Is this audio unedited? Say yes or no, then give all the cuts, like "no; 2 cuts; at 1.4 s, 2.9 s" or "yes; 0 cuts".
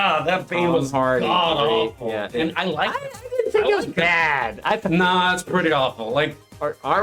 yes; 0 cuts